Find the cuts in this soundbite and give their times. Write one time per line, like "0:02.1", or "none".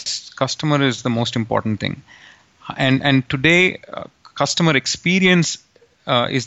none